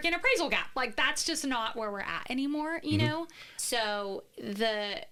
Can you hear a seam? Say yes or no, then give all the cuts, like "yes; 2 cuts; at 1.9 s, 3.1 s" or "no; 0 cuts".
no; 0 cuts